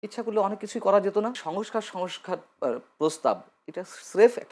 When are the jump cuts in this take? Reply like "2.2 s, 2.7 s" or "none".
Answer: 1.4 s